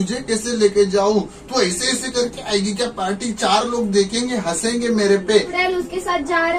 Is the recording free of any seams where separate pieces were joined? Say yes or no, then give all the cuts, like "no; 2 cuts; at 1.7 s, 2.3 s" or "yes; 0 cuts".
no; 1 cut; at 5.5 s